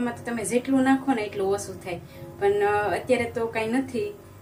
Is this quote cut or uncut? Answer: uncut